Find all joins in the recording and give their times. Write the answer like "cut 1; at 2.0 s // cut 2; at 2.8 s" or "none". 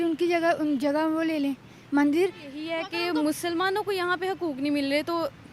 cut 1; at 2.8 s